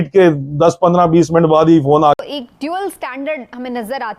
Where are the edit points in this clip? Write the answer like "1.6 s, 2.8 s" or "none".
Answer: 2.2 s